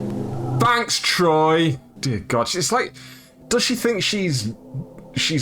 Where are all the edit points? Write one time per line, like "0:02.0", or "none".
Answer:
0:01.9